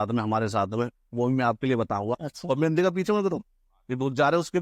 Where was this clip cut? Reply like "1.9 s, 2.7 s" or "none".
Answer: 2.3 s